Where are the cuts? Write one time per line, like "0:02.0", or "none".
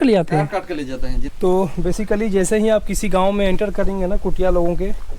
0:01.2